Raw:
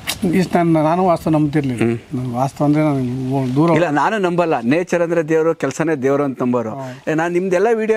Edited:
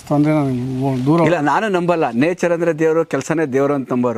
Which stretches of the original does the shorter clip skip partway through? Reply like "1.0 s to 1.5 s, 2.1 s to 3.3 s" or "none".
none